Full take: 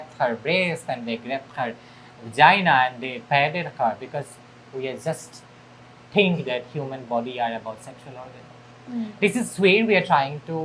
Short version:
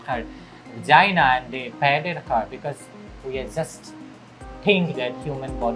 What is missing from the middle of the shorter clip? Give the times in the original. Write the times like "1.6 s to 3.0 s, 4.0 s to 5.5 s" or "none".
none